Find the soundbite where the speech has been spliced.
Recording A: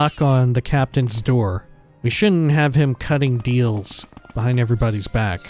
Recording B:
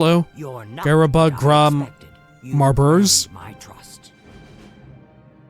A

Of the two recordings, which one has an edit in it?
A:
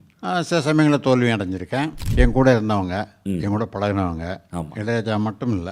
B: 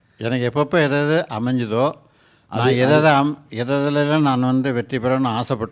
A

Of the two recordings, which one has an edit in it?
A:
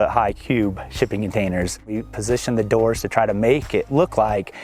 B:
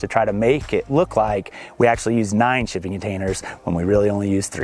A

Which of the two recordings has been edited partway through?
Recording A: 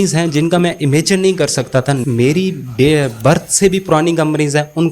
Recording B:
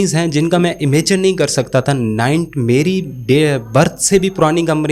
A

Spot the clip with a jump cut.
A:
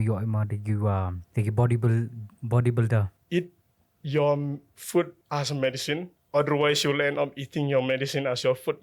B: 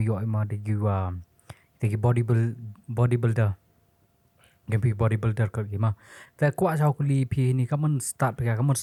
A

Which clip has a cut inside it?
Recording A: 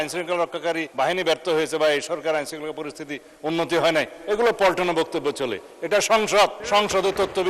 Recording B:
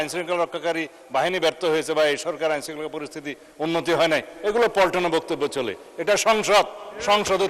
A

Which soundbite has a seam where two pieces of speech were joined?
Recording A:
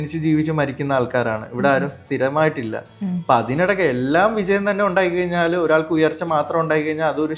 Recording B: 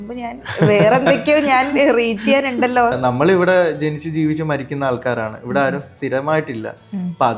B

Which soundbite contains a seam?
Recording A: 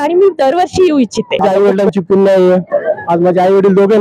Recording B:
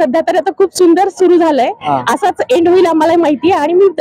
A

